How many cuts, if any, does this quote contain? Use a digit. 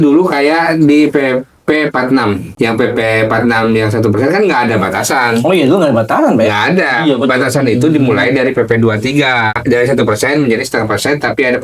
2